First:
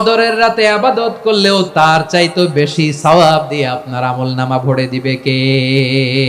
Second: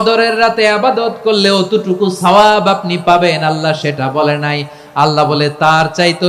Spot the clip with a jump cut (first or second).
first